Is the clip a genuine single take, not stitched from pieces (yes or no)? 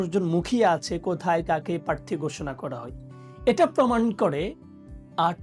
yes